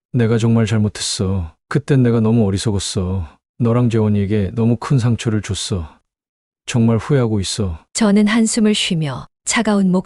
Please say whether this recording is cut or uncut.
uncut